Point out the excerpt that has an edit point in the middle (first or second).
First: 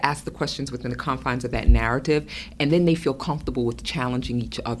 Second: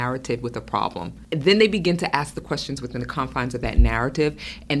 second